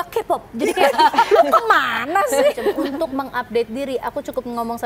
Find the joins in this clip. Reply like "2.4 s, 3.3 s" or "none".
2.9 s